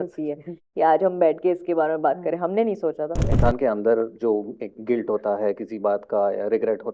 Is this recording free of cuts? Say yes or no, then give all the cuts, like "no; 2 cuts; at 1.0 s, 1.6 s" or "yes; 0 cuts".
no; 1 cut; at 3.3 s